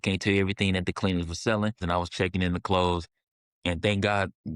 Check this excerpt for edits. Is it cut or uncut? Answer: cut